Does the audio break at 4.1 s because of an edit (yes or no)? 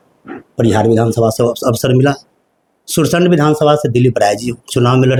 no